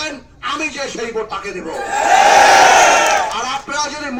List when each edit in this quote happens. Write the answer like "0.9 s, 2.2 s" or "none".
none